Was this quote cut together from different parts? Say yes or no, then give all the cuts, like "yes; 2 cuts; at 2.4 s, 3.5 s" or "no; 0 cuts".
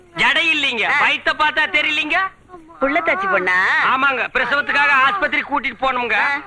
yes; 1 cut; at 3.6 s